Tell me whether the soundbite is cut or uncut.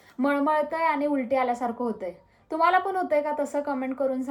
uncut